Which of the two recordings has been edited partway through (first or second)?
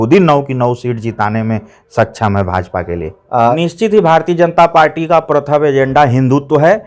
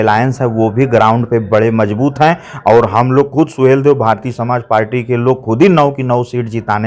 first